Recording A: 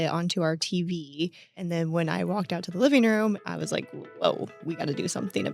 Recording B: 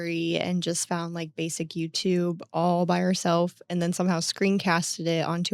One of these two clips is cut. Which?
A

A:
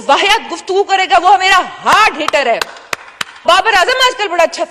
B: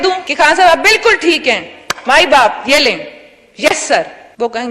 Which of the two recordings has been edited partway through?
A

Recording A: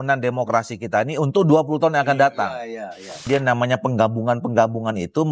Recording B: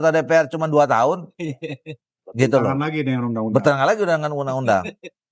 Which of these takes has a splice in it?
A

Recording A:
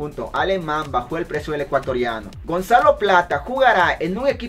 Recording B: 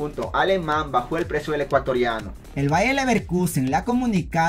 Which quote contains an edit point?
A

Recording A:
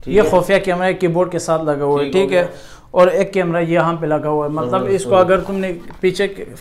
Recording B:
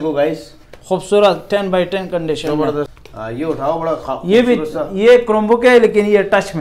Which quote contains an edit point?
B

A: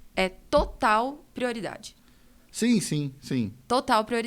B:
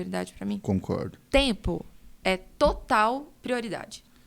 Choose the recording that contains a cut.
B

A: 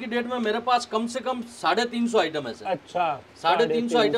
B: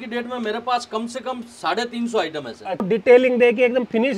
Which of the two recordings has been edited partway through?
B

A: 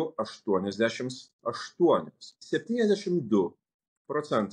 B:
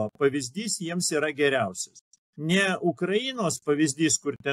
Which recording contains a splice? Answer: A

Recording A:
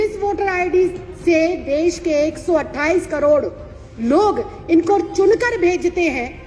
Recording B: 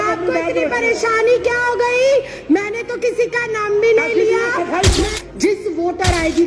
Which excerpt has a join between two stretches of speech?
B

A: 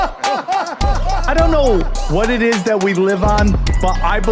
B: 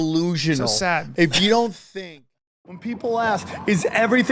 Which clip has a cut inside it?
B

